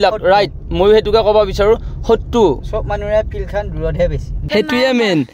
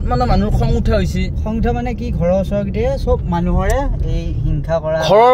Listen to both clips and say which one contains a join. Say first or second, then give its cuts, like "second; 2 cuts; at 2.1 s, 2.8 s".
first; 1 cut; at 4.3 s